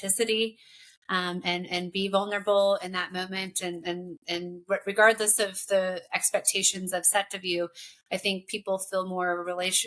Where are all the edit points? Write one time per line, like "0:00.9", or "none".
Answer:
none